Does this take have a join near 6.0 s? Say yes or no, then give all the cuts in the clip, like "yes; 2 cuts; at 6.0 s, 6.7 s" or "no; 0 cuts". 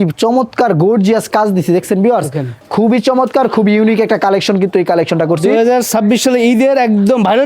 no; 1 cut; at 2.5 s